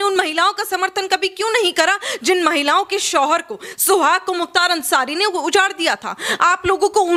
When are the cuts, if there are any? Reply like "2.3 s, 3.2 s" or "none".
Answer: none